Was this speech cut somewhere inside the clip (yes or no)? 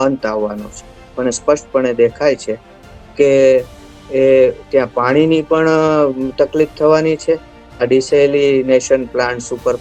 no